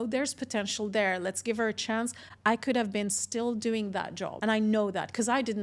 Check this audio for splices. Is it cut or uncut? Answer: cut